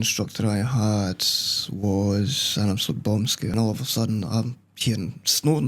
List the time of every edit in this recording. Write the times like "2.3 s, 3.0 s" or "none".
3.5 s